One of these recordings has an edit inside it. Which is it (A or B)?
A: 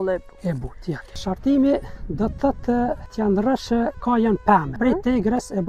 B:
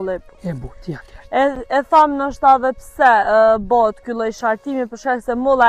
A